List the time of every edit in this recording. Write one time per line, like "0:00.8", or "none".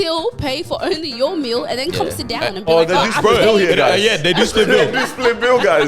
none